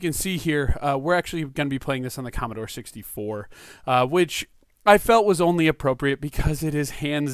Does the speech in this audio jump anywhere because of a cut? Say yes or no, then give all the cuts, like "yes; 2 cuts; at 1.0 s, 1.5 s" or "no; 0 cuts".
no; 0 cuts